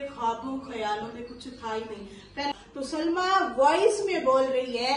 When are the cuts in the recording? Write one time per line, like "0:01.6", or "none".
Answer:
0:02.5